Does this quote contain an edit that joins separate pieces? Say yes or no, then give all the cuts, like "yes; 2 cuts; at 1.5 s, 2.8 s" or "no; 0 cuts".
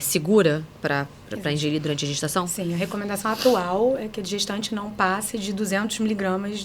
no; 0 cuts